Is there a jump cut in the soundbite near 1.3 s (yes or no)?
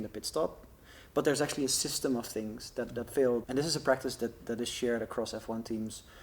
no